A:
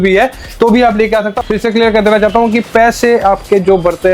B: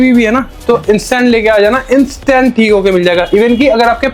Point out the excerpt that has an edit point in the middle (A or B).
A